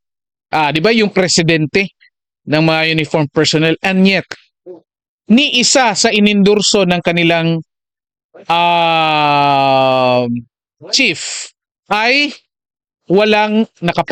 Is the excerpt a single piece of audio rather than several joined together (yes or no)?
yes